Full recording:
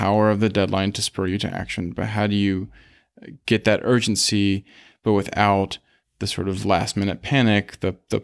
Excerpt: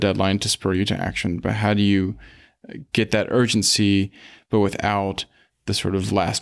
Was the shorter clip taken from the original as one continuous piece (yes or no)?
yes